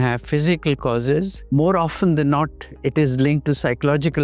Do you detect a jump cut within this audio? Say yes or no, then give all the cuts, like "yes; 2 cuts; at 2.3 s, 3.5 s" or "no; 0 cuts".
yes; 1 cut; at 1.4 s